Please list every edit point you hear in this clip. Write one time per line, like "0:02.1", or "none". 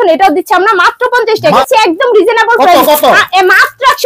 0:01.6